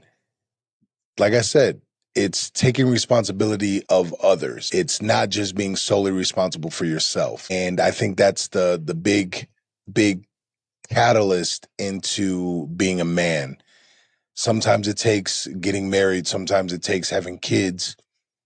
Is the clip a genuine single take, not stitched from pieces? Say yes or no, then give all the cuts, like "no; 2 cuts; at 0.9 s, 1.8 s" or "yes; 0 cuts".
no; 3 cuts; at 3.8 s, 4.6 s, 7.5 s